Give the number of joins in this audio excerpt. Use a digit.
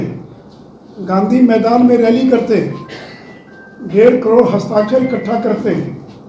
0